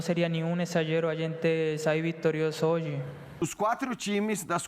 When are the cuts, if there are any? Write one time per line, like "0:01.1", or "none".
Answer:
0:03.2